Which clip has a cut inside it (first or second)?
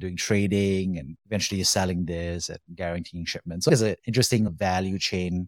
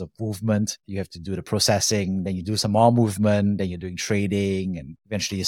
first